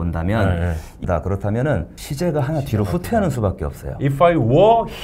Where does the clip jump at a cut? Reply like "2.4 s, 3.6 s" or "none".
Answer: 1.0 s, 2.0 s